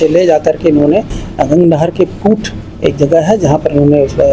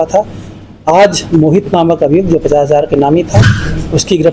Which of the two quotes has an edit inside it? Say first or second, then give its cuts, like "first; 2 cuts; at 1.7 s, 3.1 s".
first; 1 cut; at 1.2 s